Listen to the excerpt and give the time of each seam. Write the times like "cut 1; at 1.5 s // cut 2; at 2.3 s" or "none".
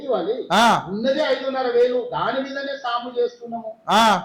none